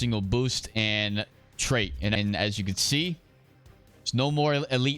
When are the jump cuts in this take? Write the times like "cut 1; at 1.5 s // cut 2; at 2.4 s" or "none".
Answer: cut 1; at 2.1 s